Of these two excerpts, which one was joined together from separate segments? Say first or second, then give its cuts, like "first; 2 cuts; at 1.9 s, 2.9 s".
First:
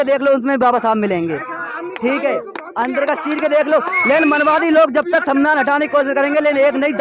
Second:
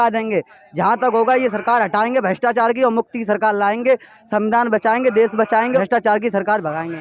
second; 1 cut; at 5.8 s